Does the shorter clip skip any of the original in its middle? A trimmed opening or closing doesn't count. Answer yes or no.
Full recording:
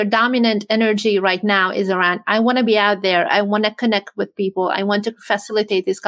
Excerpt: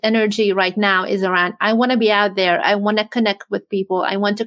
no